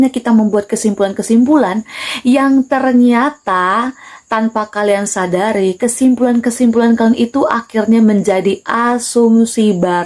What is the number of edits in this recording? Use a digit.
0